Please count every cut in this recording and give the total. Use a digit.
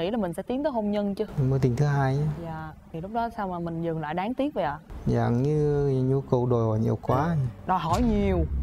1